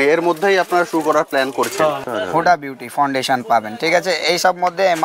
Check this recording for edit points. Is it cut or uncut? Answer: cut